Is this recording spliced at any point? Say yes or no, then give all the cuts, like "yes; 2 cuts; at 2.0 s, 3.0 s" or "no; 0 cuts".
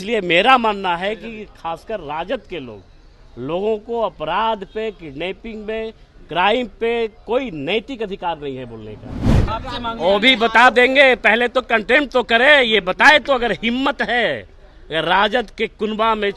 yes; 1 cut; at 9.3 s